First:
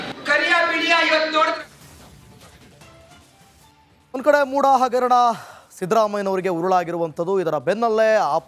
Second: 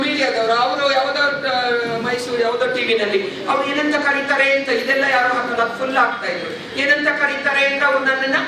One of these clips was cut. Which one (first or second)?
first